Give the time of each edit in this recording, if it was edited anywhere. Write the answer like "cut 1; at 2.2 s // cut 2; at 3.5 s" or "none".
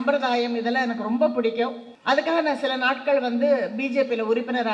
cut 1; at 1.9 s